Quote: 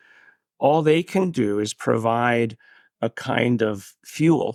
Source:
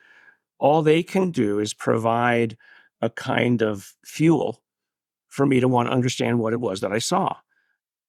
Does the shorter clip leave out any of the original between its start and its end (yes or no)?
no